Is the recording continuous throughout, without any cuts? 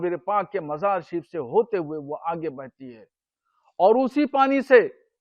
yes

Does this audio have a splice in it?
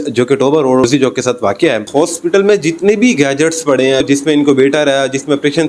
yes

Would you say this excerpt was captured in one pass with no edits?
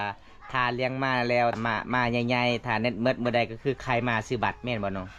no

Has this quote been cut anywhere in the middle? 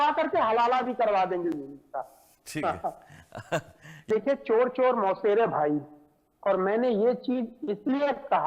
yes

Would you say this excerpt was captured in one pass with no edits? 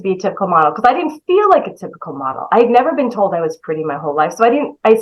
yes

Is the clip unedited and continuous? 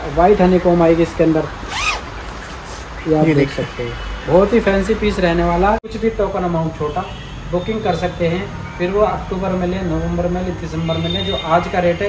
no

